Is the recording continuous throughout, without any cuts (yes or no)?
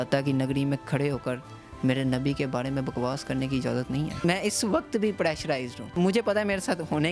no